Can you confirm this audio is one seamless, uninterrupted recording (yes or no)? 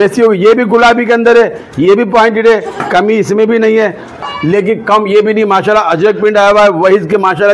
no